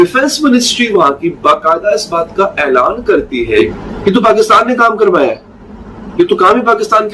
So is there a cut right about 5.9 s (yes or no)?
no